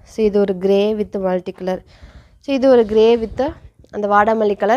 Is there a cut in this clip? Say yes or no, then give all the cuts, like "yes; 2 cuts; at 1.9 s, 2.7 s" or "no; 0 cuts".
no; 0 cuts